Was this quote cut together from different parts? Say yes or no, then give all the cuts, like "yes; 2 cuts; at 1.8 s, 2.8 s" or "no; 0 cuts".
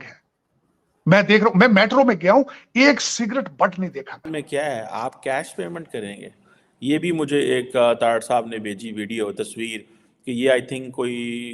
yes; 1 cut; at 4.3 s